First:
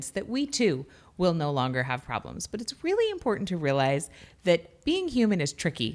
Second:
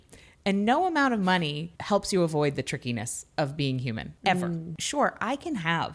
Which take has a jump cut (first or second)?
second